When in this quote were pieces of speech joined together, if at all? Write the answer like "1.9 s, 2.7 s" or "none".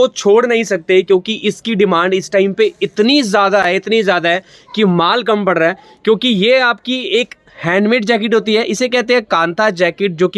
none